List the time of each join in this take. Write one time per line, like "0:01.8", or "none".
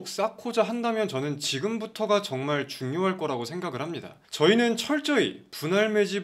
none